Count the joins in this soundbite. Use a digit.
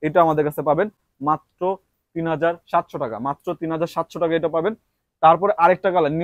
0